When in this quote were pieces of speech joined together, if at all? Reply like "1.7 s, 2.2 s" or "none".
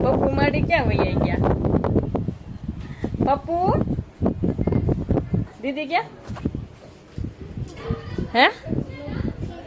none